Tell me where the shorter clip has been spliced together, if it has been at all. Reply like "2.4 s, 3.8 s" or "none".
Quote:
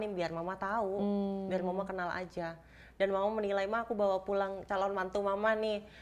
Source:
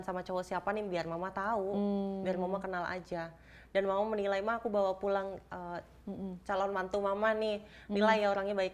4.6 s